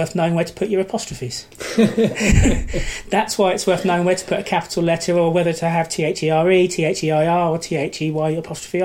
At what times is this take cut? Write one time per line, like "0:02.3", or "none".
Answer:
none